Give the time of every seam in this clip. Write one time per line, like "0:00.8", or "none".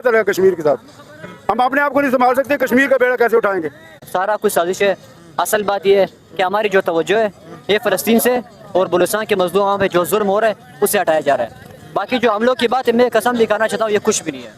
none